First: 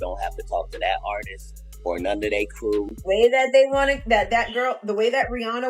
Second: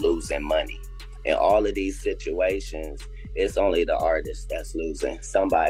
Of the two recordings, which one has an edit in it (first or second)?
first